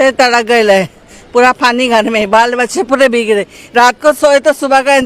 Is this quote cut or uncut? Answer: uncut